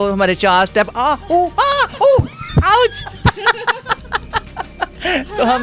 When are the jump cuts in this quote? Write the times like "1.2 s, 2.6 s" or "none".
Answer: none